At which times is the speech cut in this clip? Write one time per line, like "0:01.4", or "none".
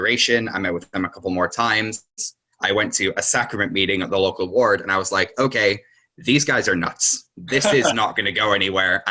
none